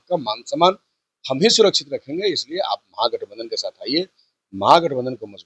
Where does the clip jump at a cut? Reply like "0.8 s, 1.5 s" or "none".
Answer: none